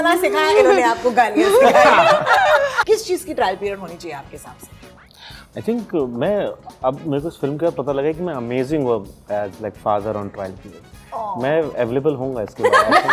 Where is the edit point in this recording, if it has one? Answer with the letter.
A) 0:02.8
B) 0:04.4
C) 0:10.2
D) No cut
A